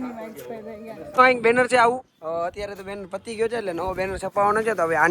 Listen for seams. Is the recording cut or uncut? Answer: cut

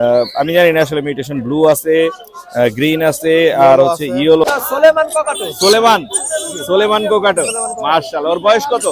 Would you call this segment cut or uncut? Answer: cut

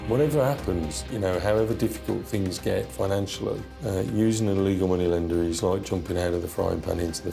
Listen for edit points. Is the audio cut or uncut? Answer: uncut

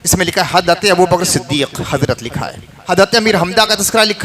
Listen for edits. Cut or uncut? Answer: cut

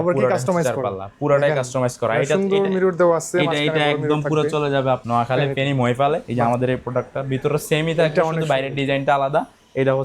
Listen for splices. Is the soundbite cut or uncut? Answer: cut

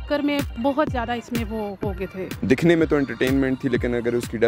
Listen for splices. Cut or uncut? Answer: cut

